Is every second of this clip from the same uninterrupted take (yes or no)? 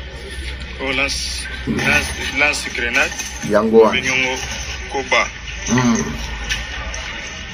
yes